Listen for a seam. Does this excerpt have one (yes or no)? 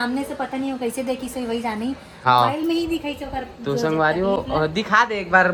no